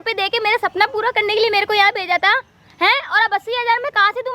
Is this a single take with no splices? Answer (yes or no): yes